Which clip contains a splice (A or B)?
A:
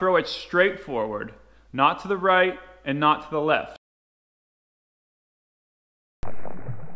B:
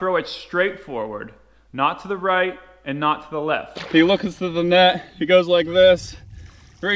B